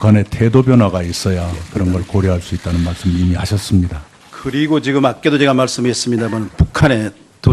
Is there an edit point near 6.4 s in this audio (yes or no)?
no